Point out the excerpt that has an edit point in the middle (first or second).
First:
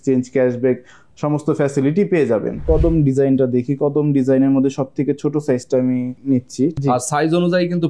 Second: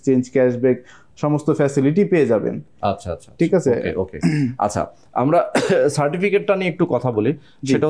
first